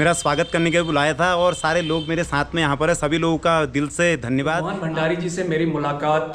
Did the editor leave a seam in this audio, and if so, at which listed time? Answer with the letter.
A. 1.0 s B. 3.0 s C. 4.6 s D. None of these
C